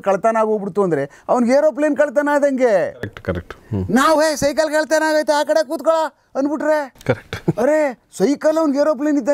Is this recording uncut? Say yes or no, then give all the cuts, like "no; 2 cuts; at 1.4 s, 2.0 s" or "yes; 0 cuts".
yes; 0 cuts